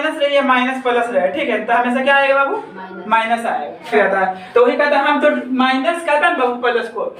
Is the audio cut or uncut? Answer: cut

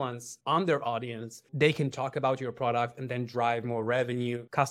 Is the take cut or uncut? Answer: cut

